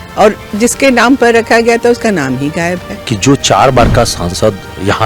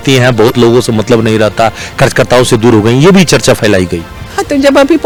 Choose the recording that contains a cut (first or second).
first